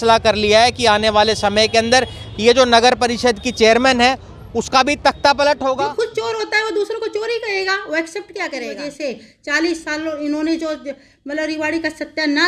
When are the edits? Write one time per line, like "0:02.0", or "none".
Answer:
0:05.8
0:08.8